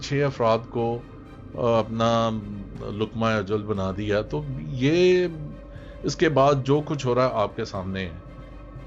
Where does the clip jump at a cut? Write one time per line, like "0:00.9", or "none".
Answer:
none